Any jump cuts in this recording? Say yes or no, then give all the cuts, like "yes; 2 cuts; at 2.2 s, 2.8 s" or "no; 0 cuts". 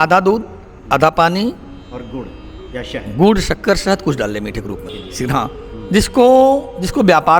yes; 1 cut; at 5.0 s